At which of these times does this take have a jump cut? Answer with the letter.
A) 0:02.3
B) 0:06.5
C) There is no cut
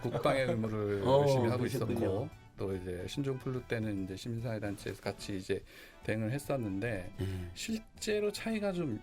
C